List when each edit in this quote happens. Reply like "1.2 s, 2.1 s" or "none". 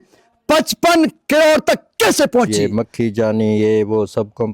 2.5 s